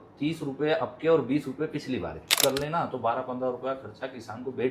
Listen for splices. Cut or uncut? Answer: cut